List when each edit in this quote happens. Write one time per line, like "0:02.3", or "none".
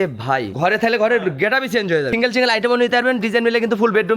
0:02.1